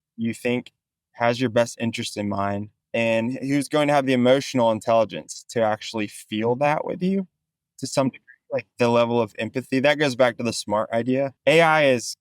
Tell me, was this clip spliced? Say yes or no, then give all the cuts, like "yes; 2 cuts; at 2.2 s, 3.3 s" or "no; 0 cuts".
yes; 2 cuts; at 2.7 s, 11.3 s